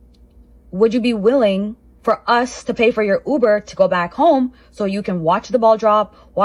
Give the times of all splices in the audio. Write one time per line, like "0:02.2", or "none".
none